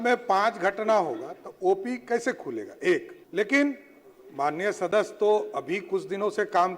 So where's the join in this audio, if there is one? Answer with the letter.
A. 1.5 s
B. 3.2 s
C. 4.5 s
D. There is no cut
B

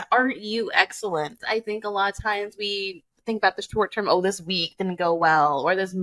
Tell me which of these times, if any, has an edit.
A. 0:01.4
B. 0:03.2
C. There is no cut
A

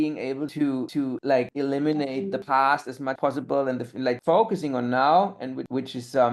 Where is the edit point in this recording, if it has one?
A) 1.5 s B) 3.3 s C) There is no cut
C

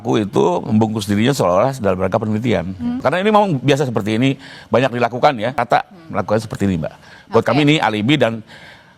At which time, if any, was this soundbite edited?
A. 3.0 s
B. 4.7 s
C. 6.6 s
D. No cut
A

